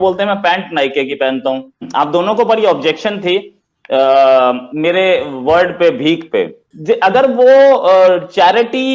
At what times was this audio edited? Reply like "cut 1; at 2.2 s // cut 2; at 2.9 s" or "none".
cut 1; at 1.8 s // cut 2; at 6.7 s